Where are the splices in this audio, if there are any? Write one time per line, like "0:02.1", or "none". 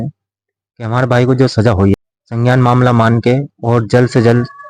0:01.9